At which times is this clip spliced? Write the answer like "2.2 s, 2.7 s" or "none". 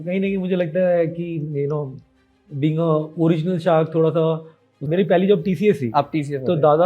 4.8 s